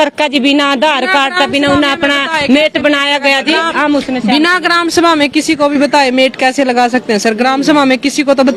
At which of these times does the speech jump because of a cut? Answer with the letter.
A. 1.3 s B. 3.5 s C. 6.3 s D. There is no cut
D